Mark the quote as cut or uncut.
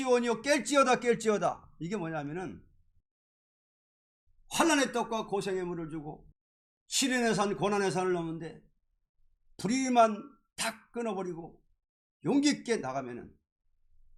uncut